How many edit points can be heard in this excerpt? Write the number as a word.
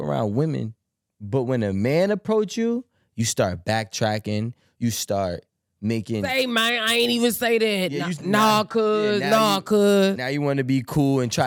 zero